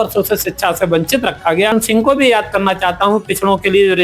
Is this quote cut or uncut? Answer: cut